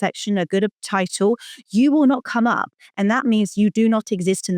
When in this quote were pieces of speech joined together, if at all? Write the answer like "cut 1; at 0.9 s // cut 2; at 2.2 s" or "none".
none